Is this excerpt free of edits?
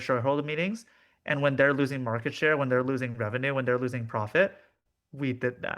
no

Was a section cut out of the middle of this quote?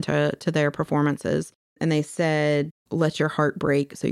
yes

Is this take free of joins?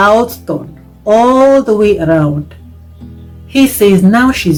yes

